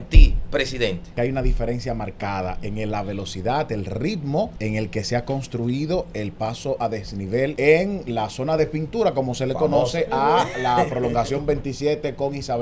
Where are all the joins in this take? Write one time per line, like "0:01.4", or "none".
0:01.1
0:04.6
0:07.5